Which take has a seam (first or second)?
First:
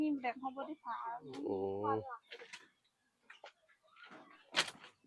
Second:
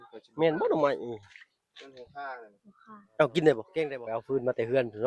second